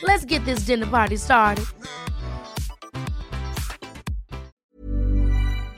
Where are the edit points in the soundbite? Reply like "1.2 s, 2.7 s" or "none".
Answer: 4.7 s